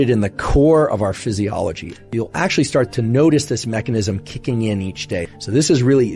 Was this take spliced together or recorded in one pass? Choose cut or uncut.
cut